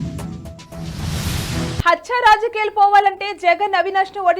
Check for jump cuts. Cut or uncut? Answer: cut